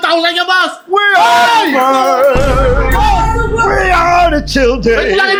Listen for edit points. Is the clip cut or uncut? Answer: uncut